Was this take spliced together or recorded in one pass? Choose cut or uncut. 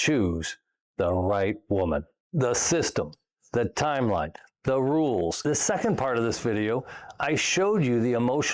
cut